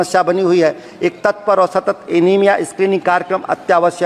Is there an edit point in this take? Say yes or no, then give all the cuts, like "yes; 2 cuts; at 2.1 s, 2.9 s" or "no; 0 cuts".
no; 0 cuts